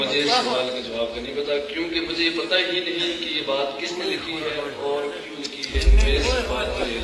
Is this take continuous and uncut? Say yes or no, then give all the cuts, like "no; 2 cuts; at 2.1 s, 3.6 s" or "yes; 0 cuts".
yes; 0 cuts